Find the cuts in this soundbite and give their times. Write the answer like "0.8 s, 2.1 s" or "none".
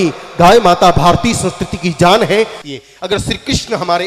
2.6 s